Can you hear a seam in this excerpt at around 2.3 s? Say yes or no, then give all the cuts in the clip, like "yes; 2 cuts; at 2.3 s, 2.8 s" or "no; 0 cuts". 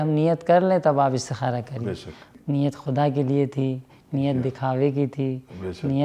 yes; 1 cut; at 2.3 s